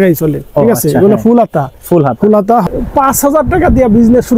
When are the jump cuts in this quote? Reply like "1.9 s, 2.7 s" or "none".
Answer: 2.7 s

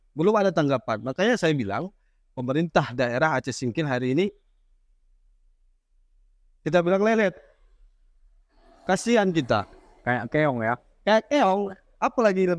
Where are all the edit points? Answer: none

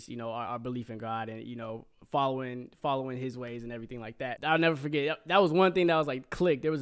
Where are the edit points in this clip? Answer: 4.4 s

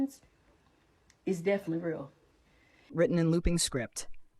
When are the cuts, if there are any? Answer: 2.9 s

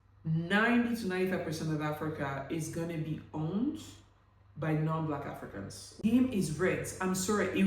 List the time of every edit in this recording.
6.0 s

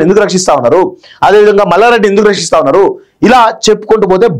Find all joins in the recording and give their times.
none

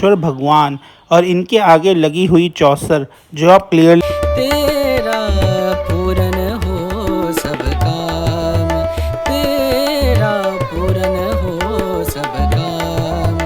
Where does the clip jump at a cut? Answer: 4.0 s

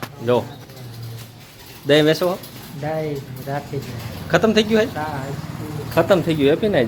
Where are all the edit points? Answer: none

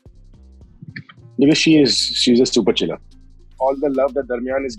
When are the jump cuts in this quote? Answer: 3.4 s

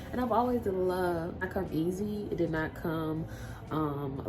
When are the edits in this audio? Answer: 1.4 s

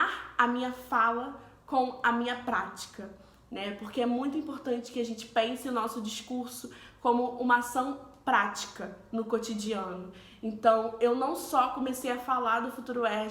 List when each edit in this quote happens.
none

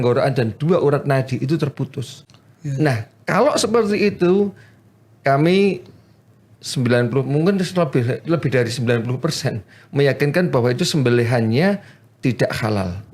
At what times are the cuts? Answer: 2.1 s

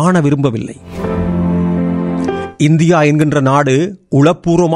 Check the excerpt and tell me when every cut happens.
1.2 s

